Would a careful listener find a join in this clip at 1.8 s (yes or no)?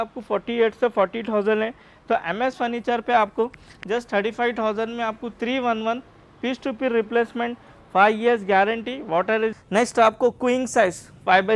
no